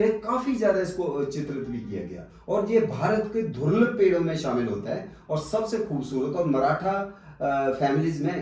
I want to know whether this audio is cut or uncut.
uncut